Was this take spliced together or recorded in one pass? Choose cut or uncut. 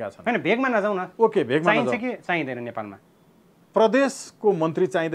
uncut